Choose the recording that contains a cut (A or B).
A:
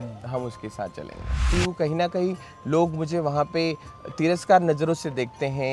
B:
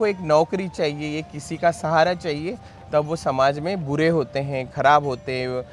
A